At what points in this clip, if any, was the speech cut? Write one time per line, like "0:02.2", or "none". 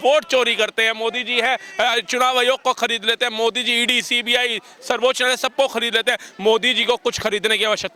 none